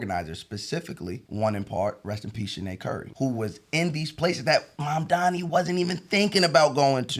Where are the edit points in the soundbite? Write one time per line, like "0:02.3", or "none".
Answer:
0:01.2
0:03.1

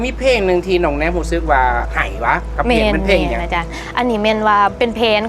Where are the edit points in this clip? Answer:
0:02.0
0:03.8

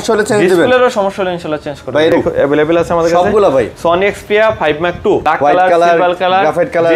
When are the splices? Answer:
0:02.1
0:05.2

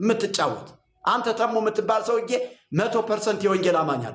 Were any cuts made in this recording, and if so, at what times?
none

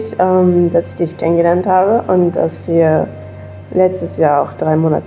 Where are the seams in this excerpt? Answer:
none

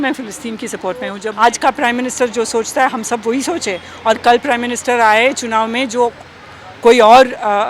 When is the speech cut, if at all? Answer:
0:01.3

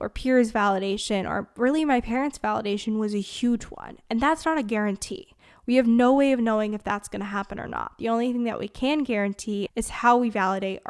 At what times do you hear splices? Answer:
0:09.7

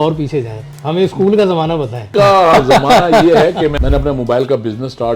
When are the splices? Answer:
0:02.1
0:03.8

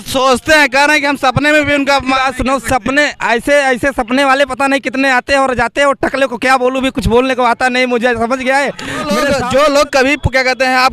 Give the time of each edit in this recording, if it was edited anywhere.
0:09.2

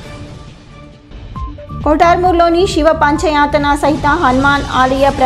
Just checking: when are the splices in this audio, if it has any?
0:00.9

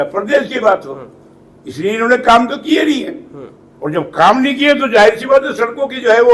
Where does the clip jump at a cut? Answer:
none

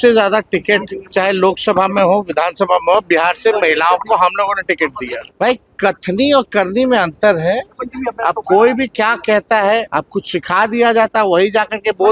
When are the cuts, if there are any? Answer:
0:01.0
0:05.2
0:09.9

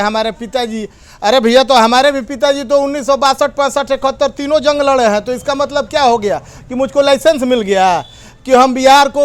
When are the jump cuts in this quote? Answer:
none

